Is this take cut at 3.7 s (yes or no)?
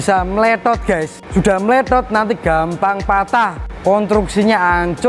yes